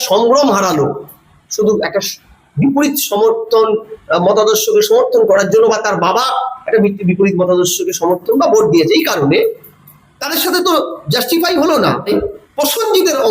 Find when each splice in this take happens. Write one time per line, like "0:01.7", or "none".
0:12.1